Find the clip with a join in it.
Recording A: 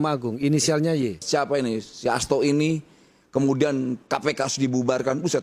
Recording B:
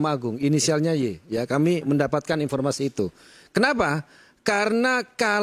A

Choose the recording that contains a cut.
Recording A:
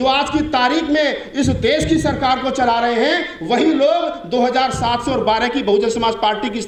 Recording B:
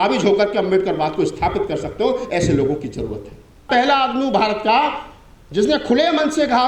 B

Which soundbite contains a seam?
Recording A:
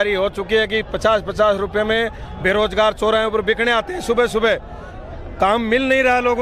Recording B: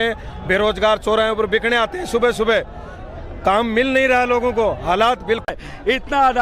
B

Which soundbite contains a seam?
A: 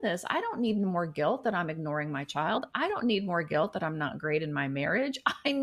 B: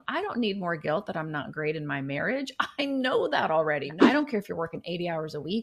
B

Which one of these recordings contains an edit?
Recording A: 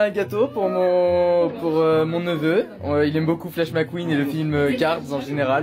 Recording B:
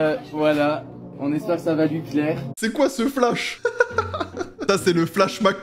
B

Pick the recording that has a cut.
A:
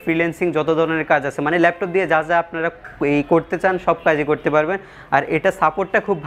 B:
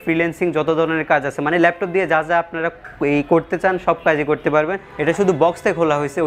B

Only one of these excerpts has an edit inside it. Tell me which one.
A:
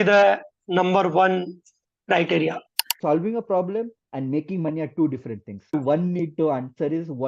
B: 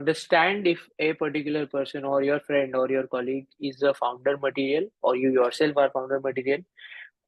A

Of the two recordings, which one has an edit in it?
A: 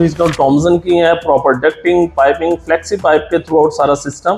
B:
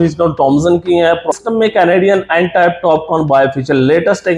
B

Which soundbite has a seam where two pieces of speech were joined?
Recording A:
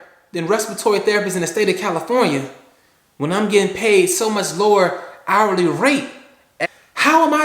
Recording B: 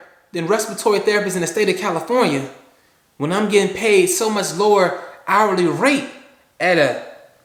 A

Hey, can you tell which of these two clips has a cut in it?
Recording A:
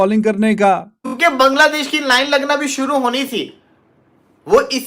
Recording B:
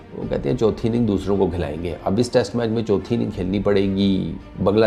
A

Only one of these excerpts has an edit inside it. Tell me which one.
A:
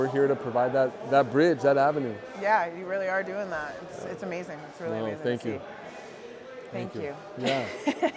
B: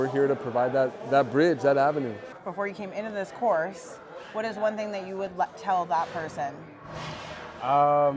B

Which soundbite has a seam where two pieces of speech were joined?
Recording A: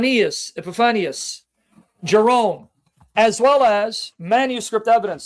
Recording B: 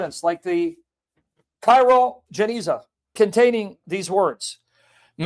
B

